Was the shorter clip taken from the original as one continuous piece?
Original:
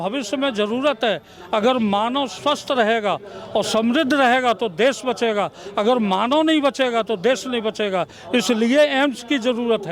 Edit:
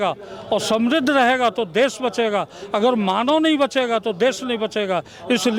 yes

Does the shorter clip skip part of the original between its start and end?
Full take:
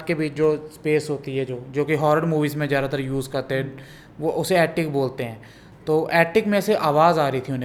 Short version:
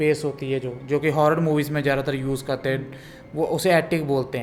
no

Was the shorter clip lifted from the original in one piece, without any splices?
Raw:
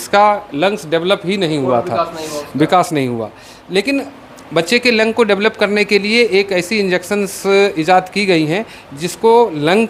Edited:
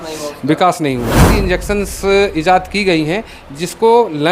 no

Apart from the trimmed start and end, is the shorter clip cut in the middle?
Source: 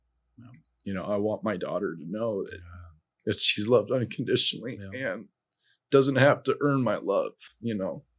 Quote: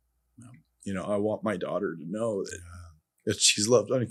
no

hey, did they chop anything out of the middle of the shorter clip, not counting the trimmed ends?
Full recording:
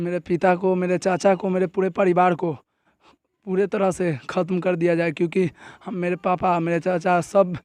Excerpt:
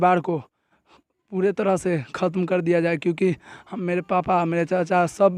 no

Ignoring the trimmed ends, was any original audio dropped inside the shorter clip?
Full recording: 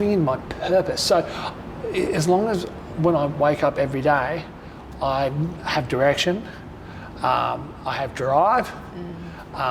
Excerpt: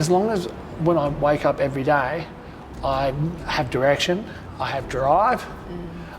yes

